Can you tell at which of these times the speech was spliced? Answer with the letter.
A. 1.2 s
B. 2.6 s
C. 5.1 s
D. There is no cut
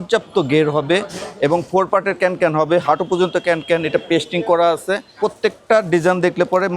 C